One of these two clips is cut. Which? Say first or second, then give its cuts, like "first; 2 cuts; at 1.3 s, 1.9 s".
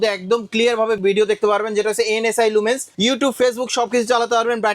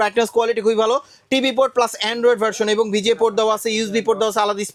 first; 2 cuts; at 1.0 s, 2.9 s